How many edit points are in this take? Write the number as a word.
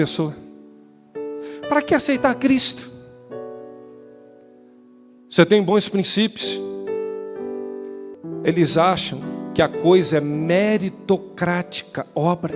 one